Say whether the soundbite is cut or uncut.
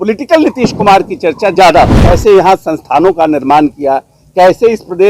cut